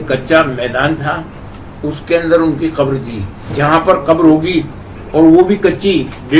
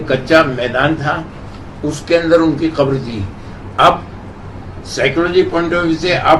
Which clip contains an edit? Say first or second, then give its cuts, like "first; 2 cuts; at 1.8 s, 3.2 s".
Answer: first; 1 cut; at 3.5 s